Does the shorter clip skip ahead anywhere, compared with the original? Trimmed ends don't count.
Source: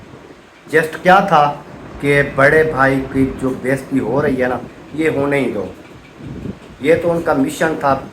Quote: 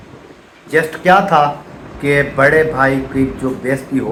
no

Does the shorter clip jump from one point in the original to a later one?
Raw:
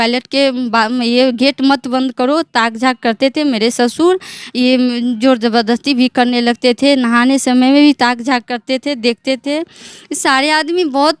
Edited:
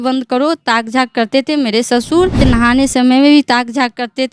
yes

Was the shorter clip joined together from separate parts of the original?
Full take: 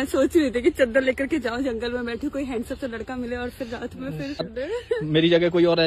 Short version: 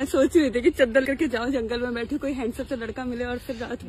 yes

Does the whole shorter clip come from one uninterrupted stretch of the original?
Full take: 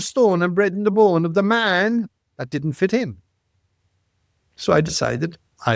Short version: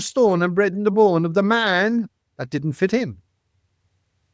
yes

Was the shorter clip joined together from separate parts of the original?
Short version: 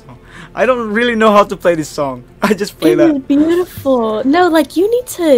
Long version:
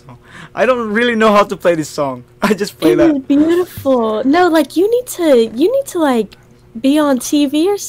no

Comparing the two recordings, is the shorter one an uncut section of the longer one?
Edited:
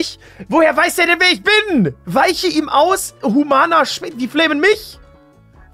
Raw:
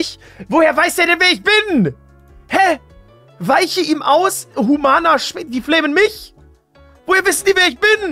no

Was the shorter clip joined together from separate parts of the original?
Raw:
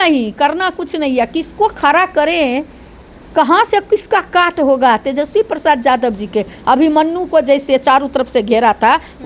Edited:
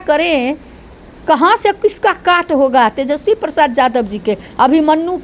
no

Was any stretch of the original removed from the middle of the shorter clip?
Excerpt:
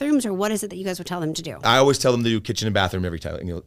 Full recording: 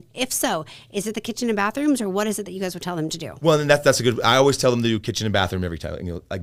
yes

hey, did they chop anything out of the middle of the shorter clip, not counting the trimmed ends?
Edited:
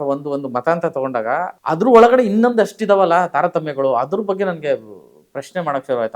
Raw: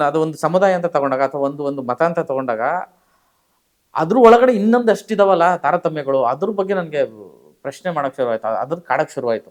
yes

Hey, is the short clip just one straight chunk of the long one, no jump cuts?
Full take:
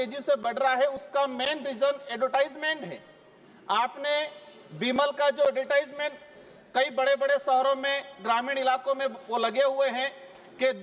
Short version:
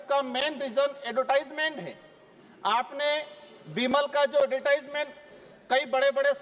yes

